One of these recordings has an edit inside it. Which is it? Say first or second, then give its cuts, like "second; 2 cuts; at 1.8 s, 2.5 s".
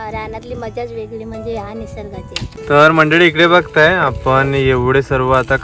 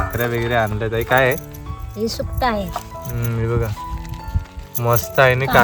first; 1 cut; at 2.5 s